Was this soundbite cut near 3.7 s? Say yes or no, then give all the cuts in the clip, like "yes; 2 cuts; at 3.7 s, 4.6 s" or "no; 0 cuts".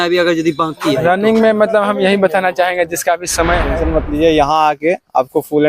yes; 1 cut; at 3.7 s